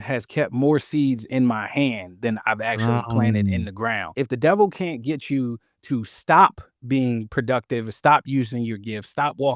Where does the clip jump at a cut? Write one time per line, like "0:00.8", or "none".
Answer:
0:04.1